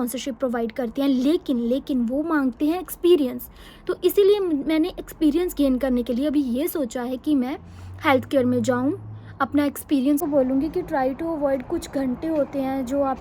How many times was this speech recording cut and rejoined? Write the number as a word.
one